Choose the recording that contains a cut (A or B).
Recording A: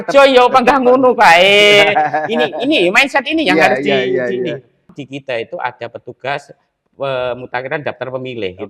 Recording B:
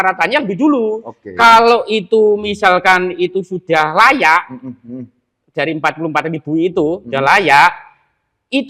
A